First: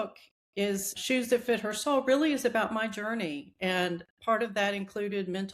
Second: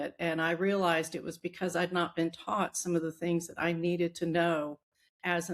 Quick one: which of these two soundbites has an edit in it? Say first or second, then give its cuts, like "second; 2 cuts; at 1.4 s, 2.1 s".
first; 1 cut; at 0.9 s